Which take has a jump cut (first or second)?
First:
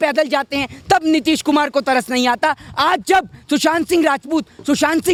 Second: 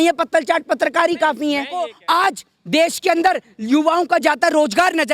second